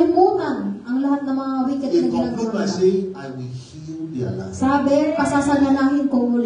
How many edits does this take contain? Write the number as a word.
zero